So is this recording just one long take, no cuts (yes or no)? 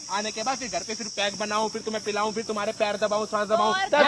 yes